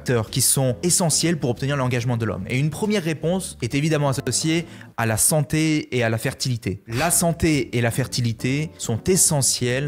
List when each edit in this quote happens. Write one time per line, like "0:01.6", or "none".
none